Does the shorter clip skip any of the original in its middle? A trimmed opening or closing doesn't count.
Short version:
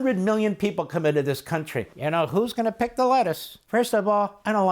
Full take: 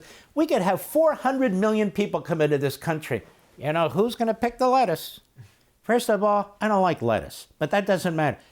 yes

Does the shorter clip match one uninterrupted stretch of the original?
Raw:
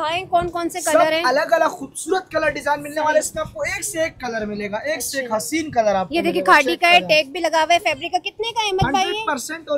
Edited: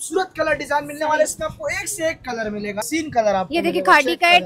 no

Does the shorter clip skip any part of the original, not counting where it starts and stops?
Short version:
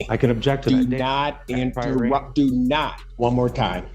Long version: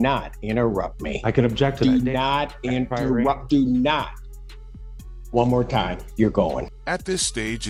yes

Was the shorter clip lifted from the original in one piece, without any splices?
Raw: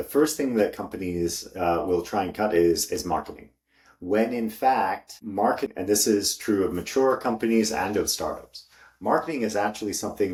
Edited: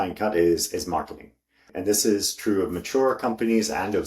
no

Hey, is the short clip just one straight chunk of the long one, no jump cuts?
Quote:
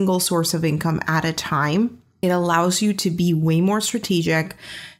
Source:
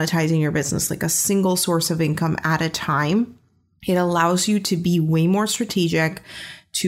no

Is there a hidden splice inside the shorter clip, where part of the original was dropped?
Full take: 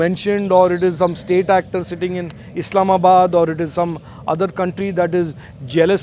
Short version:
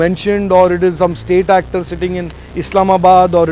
no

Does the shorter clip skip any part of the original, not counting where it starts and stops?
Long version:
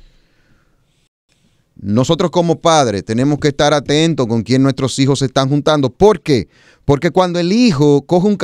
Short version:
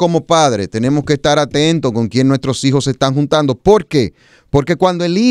no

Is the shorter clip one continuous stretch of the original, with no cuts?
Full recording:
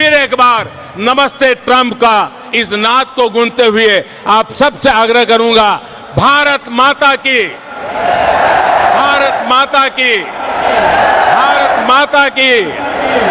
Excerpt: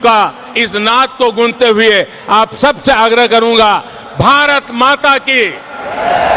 yes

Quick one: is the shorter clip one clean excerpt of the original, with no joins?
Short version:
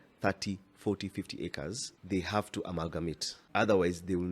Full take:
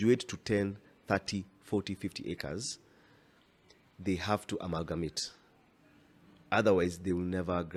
no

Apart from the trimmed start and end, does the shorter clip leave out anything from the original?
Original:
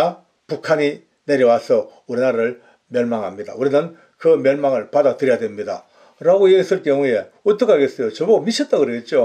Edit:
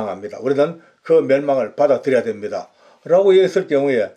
no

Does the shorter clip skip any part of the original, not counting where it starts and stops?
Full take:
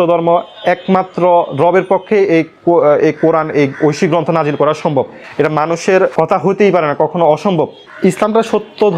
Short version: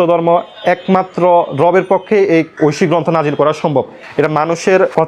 yes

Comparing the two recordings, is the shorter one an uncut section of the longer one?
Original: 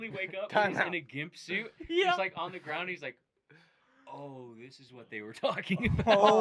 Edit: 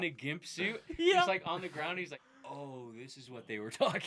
no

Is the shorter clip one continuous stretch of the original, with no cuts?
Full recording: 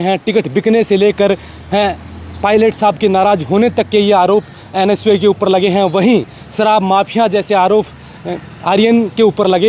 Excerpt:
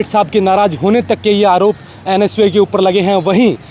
yes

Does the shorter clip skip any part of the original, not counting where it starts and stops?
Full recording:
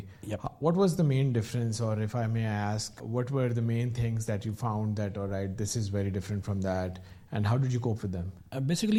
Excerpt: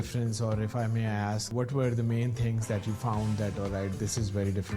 yes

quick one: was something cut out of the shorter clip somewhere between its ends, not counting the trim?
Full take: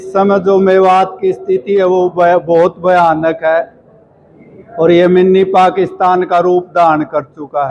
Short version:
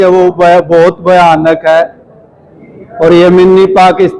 no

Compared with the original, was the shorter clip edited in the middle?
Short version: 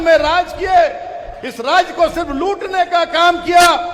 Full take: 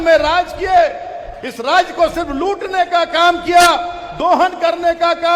no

